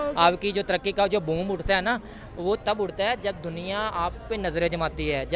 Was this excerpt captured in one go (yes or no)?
yes